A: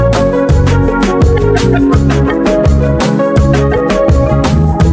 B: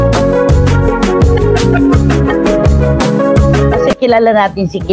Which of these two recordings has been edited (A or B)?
B